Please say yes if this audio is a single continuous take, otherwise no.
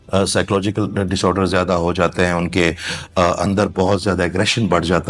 yes